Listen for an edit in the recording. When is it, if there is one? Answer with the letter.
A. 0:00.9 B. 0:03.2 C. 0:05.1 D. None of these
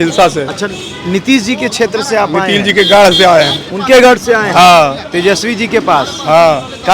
D